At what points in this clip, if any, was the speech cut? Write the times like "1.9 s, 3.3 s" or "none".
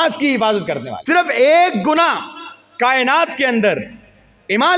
0.9 s